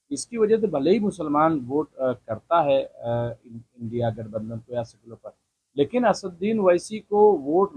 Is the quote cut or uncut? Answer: uncut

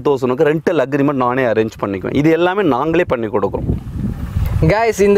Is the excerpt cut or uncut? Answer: uncut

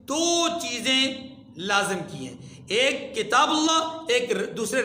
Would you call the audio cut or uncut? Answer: uncut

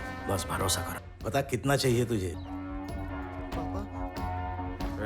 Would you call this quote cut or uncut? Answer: cut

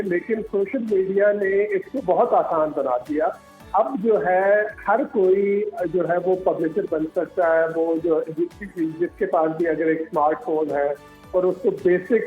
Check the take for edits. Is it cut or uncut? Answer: uncut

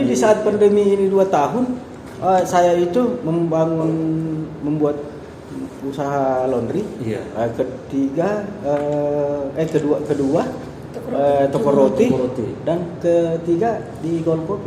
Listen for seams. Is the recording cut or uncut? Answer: uncut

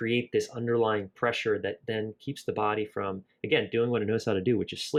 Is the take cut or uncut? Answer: uncut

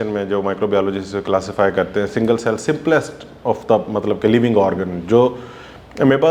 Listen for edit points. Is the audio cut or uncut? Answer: uncut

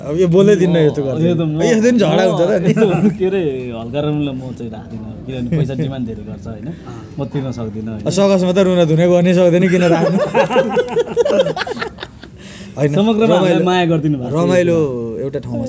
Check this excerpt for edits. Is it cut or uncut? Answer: uncut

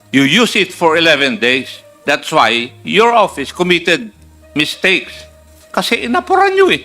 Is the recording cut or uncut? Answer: cut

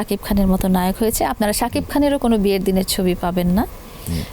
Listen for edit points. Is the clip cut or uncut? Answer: uncut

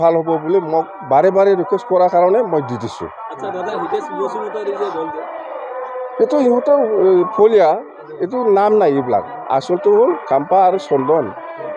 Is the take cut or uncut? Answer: uncut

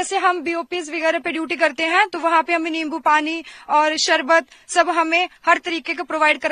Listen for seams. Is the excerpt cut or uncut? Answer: uncut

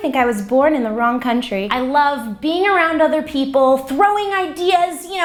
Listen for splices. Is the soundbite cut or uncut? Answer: uncut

